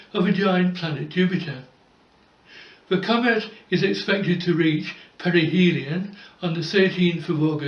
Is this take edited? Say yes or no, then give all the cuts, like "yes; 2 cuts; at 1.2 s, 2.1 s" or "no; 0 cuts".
no; 0 cuts